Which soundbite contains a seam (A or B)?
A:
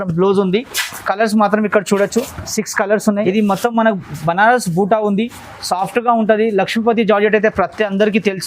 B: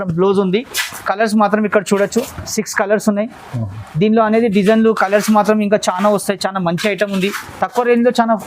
A